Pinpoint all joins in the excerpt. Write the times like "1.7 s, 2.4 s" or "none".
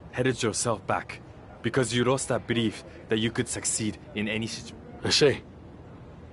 4.6 s, 5.4 s